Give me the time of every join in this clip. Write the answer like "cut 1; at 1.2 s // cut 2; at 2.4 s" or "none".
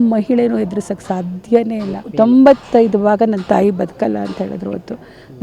cut 1; at 2.0 s